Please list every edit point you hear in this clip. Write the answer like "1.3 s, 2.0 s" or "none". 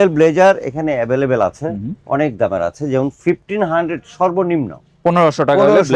none